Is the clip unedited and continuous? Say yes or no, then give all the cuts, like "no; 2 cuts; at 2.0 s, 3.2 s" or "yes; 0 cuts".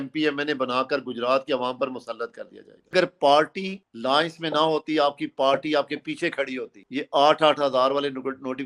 no; 2 cuts; at 2.9 s, 6.8 s